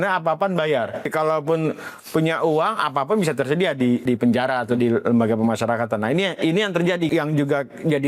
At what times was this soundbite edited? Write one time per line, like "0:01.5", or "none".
0:01.1
0:04.0
0:07.1

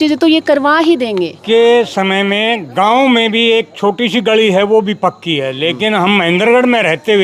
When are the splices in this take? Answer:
0:01.4

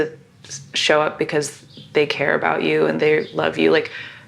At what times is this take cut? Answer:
0:03.0

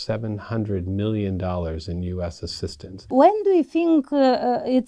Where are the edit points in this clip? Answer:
0:03.1

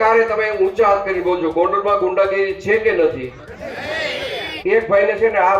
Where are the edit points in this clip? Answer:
0:04.6

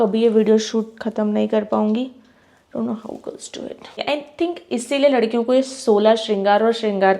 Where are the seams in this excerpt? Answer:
0:04.0

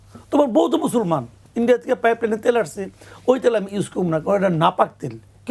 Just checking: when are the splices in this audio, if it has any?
0:01.4

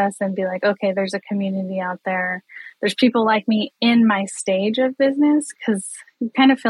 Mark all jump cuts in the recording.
0:05.5

